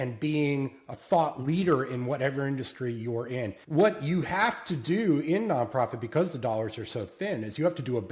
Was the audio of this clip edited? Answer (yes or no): yes